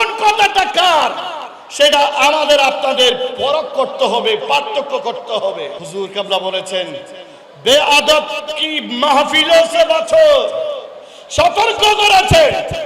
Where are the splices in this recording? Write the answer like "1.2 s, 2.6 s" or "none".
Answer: 5.8 s